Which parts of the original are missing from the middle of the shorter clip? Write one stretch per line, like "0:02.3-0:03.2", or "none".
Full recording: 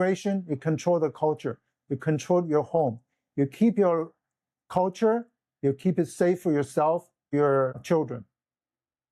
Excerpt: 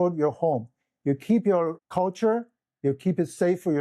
0:04.1-0:04.6

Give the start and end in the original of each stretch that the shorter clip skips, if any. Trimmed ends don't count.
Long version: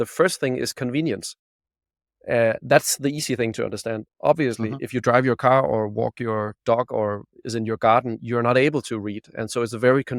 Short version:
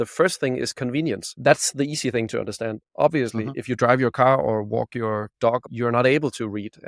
0:01.4-0:02.6
0:06.9-0:08.2

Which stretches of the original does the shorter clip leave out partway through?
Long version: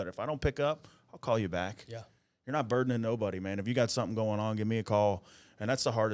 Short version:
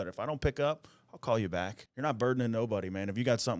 0:01.8-0:02.3

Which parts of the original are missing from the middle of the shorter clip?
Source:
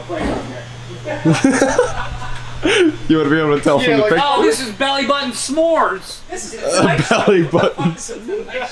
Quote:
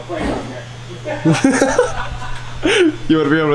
none

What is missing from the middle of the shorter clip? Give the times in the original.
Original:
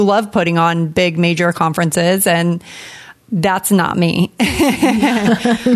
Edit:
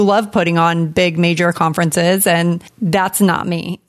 0:02.7-0:03.2

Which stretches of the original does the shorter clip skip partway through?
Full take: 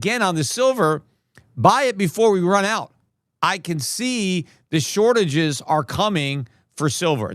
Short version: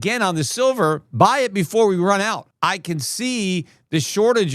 0:01.0-0:01.5
0:02.9-0:03.3

